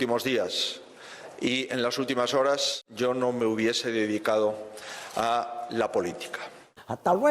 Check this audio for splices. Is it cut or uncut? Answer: cut